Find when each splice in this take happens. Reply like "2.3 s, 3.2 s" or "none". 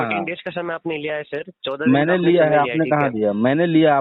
none